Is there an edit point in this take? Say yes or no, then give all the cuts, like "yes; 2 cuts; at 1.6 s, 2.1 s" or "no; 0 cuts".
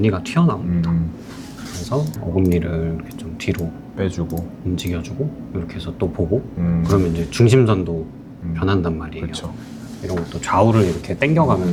no; 0 cuts